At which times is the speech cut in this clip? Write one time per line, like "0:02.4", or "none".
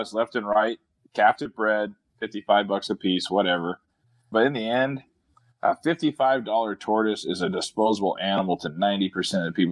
0:04.3